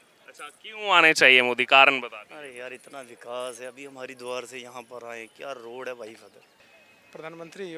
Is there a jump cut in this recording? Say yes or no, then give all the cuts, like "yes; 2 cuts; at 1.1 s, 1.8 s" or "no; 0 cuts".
yes; 1 cut; at 6.6 s